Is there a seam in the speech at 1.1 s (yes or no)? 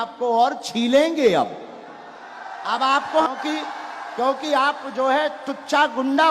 no